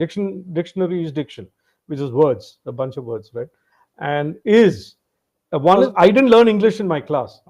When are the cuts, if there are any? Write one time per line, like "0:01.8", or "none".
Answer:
0:05.9